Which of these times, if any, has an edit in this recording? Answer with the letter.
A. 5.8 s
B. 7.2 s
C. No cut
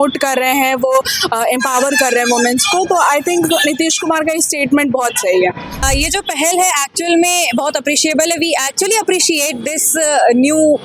A